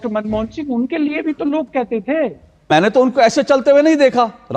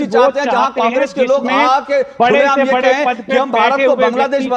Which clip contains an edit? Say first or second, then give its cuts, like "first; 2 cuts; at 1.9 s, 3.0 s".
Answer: first; 1 cut; at 2.7 s